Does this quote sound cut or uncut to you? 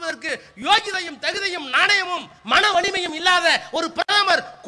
uncut